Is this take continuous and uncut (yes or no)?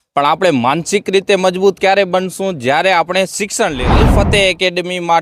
no